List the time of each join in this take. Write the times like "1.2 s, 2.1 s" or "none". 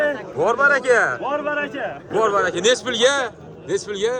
none